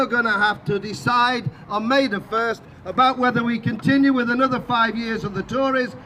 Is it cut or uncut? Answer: uncut